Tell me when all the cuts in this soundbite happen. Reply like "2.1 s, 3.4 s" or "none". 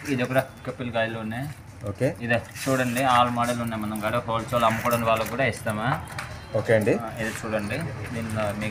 none